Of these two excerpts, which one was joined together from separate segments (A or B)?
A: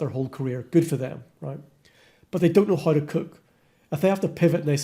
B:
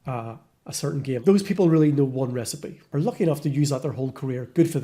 B